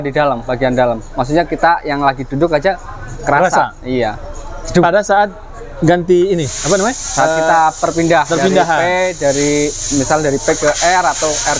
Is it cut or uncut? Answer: uncut